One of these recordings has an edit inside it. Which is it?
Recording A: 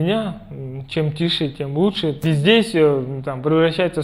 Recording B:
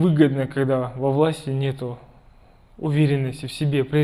A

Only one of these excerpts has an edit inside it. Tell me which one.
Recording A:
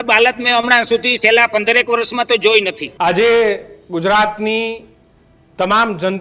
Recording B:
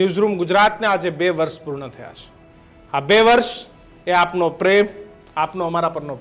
A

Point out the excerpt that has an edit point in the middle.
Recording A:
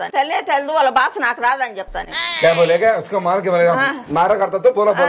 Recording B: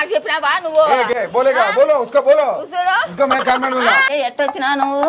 B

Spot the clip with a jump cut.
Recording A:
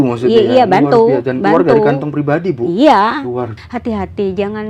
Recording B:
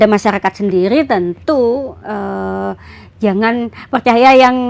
A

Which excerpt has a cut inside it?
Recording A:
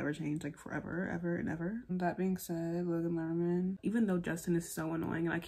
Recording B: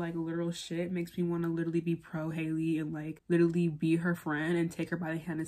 A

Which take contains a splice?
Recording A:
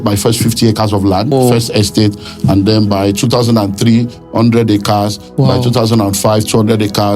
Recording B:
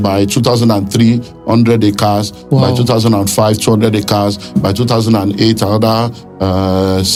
A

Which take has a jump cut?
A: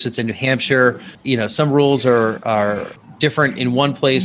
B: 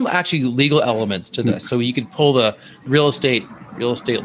B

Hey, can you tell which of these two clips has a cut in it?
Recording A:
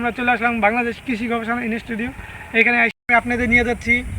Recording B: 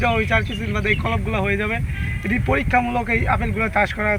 A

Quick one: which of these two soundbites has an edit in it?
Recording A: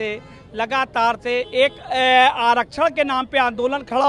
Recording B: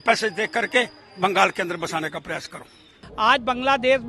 B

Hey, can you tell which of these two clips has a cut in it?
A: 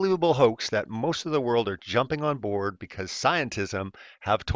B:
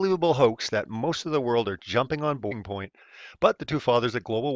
A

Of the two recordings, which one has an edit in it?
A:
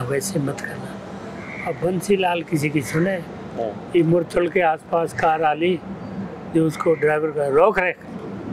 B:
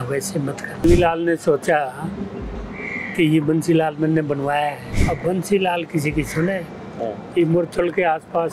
B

